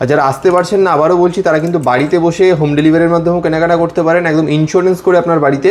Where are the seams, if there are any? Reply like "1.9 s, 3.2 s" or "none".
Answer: none